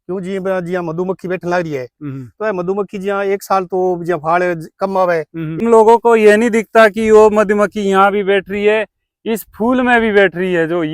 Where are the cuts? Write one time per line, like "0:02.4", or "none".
0:05.6